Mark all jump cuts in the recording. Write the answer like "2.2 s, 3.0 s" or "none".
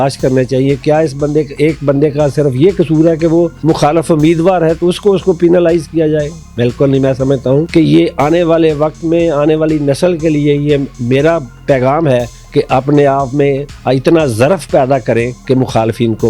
3.5 s, 7.7 s, 12.4 s, 13.7 s, 15.3 s